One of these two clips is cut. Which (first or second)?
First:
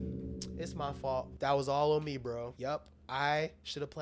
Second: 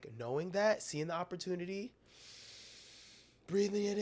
first